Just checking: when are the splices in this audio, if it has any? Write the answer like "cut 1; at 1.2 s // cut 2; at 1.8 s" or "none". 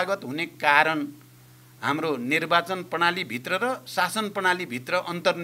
none